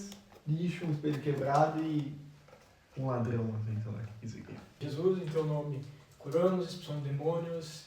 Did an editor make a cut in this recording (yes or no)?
yes